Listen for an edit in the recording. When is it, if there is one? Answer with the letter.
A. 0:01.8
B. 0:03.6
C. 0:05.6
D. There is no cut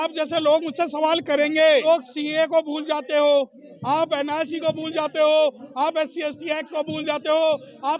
A